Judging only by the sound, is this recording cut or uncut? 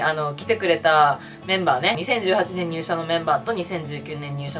cut